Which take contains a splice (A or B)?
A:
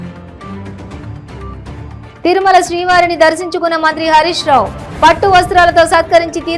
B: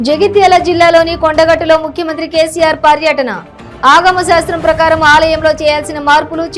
A